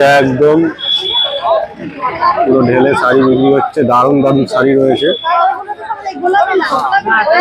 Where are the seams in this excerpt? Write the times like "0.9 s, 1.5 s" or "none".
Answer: none

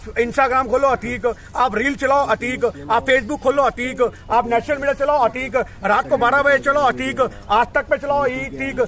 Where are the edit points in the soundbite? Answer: none

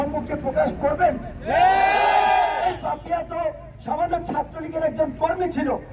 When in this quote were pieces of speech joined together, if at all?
2.6 s

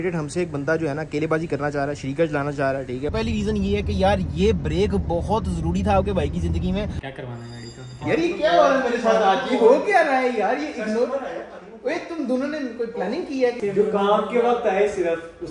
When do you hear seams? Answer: 3.1 s, 7.0 s, 13.6 s

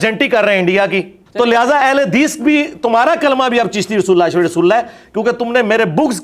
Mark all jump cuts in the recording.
1.2 s

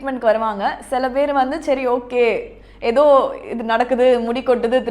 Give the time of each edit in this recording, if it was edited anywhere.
none

